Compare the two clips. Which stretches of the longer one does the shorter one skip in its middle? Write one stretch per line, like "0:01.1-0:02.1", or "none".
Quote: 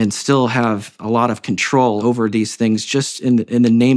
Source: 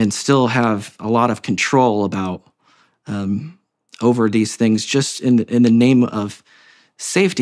0:02.0-0:04.0